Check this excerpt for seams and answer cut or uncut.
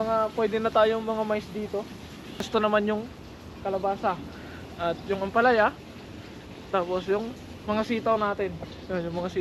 cut